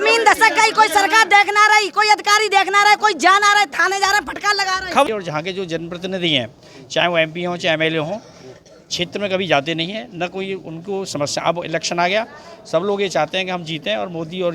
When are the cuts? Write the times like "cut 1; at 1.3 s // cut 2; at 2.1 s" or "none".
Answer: cut 1; at 5.1 s